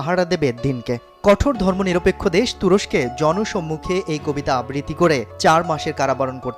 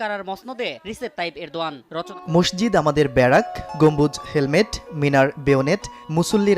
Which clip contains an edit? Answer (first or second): second